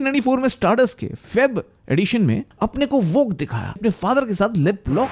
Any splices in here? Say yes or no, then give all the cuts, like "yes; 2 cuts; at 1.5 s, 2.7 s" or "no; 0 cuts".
yes; 2 cuts; at 2.5 s, 3.8 s